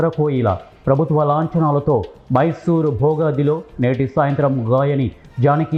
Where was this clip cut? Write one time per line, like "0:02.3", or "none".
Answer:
none